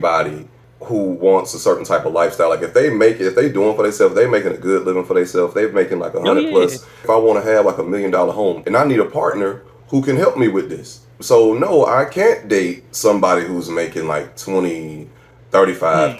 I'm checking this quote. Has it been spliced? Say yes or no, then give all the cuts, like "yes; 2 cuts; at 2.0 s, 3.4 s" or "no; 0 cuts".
yes; 4 cuts; at 7.0 s, 8.6 s, 9.8 s, 11.1 s